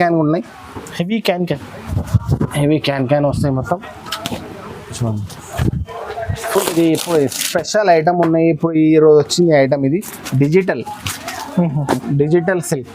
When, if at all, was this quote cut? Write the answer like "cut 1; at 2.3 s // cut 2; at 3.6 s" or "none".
cut 1; at 6.6 s